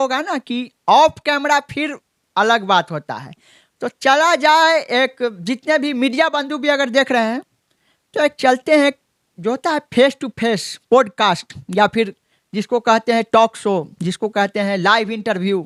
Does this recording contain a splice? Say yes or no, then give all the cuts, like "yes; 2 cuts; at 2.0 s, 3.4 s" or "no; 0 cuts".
no; 0 cuts